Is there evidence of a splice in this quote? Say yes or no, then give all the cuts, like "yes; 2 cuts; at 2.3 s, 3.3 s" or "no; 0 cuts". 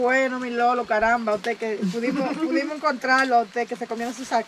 no; 0 cuts